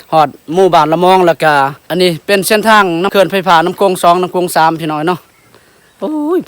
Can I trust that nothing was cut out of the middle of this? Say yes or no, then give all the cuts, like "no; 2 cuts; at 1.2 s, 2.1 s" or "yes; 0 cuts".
no; 2 cuts; at 1.8 s, 3.1 s